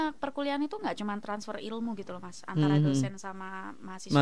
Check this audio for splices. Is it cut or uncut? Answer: uncut